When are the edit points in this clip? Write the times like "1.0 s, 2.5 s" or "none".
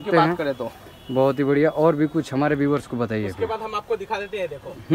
none